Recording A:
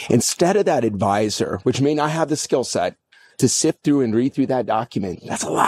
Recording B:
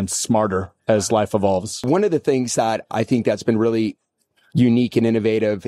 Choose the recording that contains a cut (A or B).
B